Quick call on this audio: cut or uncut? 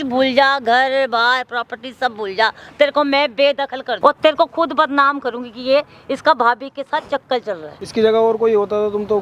cut